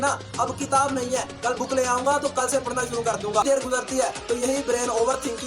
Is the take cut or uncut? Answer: cut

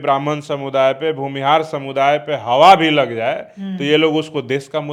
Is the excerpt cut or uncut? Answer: uncut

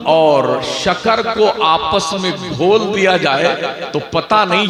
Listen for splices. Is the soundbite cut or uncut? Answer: uncut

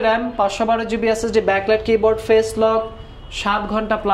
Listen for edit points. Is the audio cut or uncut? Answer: uncut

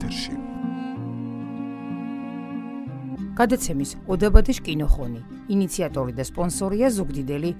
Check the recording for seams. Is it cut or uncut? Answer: cut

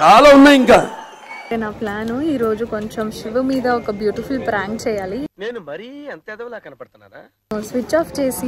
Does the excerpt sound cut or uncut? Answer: cut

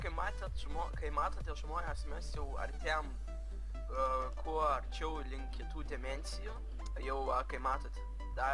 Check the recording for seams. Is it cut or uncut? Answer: cut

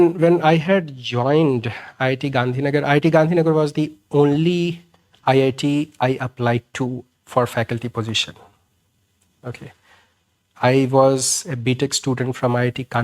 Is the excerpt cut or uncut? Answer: uncut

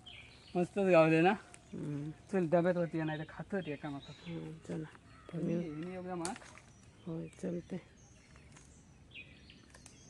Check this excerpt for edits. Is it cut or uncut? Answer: uncut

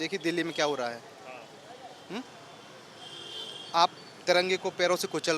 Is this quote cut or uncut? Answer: uncut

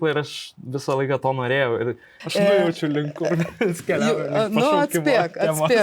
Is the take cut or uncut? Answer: cut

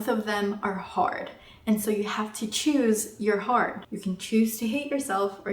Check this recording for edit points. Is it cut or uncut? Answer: cut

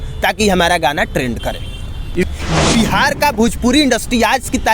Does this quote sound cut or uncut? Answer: cut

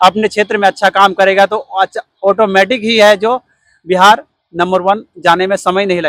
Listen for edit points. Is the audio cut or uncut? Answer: uncut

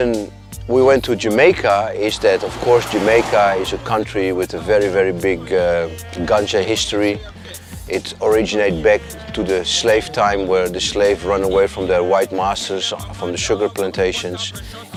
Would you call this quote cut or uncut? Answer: uncut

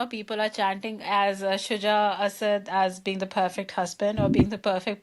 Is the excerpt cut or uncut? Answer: uncut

